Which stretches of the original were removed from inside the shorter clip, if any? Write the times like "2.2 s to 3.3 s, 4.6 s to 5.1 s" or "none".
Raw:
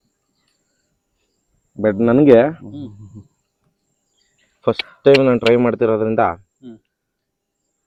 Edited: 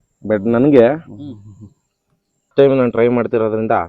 4.0 s to 4.9 s